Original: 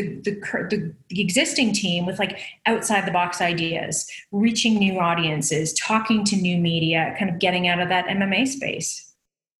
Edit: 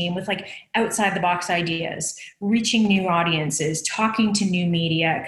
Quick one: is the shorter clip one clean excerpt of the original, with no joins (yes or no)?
yes